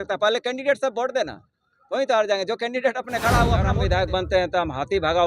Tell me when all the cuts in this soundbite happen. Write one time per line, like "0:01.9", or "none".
0:03.7

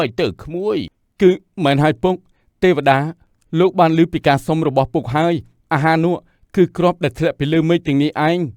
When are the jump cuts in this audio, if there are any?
0:01.0

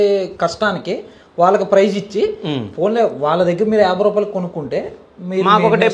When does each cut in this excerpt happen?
none

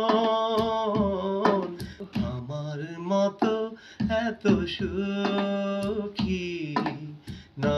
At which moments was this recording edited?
0:01.8

